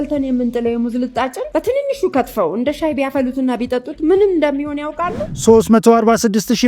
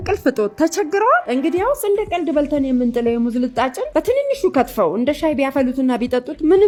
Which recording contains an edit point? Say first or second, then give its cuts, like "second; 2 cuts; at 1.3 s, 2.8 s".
first; 1 cut; at 5.2 s